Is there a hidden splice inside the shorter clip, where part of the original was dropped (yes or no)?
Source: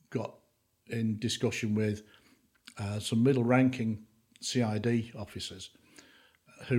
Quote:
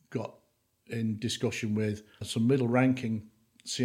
yes